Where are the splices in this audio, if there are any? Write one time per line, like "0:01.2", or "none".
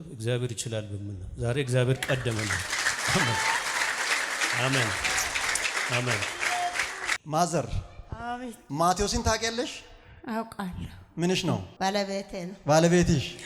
0:07.2
0:11.7